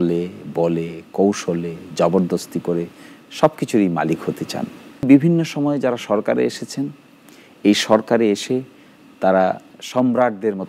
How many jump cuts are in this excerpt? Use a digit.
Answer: 2